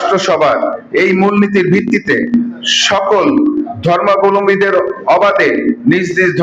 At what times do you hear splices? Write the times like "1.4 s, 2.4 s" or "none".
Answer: none